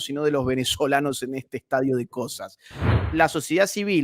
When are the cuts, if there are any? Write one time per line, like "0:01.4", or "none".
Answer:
0:02.8